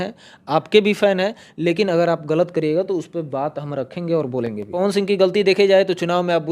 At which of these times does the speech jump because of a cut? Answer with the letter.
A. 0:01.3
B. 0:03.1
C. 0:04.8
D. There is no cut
C